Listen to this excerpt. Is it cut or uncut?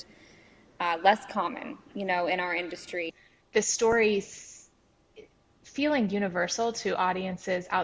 cut